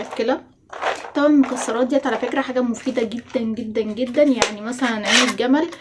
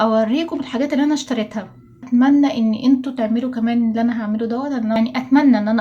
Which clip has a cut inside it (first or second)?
second